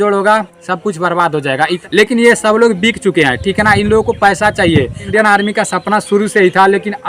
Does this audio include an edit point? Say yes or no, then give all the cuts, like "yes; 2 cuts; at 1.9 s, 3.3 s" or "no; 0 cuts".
yes; 2 cuts; at 1.8 s, 5.1 s